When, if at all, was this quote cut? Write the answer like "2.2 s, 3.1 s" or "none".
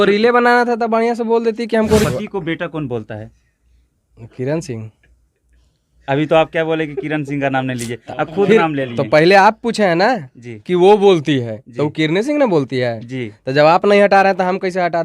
2.0 s

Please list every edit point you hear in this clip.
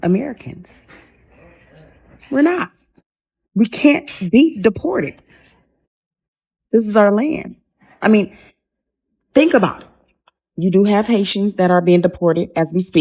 none

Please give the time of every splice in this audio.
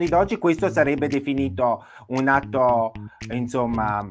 none

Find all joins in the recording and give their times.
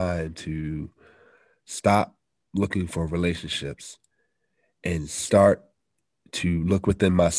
none

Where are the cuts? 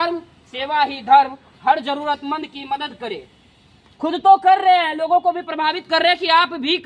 none

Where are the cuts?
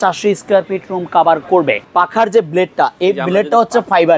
1.8 s

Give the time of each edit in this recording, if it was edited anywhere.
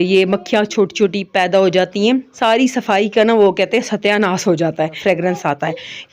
2.3 s, 5.0 s

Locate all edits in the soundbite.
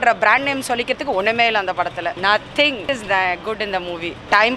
2.9 s

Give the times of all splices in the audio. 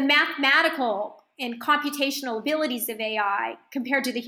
none

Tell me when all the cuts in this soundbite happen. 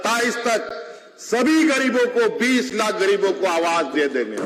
none

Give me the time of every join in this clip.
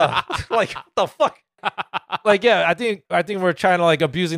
1.6 s, 3.0 s

